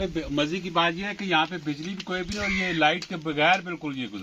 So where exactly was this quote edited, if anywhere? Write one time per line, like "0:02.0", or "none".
none